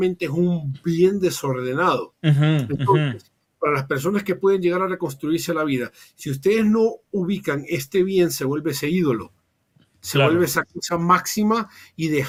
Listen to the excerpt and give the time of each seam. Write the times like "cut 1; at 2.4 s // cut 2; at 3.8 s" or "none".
none